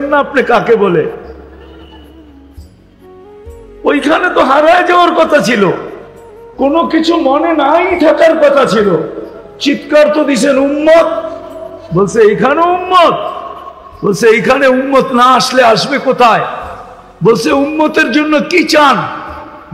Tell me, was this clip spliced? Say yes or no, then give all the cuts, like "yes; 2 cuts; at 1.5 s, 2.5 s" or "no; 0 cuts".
yes; 2 cuts; at 1.4 s, 3.5 s